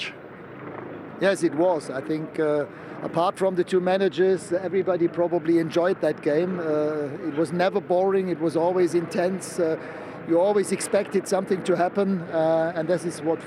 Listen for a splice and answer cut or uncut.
uncut